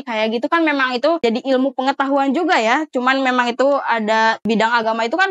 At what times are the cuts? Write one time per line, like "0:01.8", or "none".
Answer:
0:01.2
0:04.4

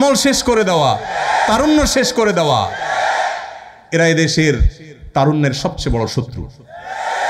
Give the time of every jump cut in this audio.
none

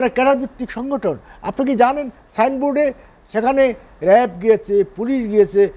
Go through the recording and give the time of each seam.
none

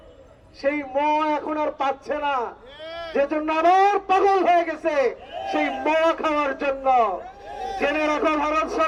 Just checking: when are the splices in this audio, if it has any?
none

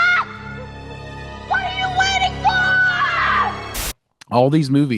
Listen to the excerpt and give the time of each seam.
0:03.8

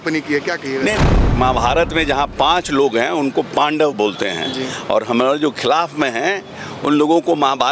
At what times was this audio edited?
0:01.3

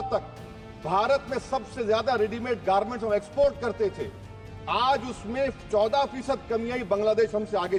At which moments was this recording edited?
none

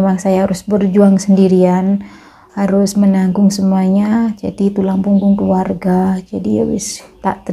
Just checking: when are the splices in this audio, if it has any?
none

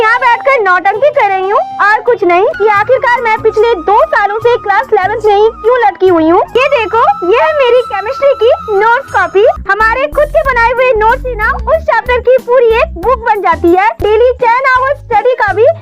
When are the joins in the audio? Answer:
0:02.5
0:06.5
0:09.7
0:14.0

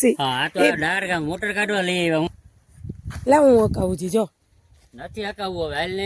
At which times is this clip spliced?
0:02.3

